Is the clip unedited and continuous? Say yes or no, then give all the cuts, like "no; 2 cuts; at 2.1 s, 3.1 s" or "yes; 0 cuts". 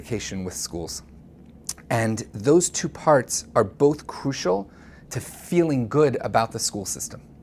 no; 1 cut; at 3.4 s